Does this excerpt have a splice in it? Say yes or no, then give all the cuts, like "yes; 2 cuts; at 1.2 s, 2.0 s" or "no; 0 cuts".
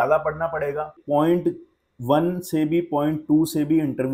yes; 1 cut; at 1.0 s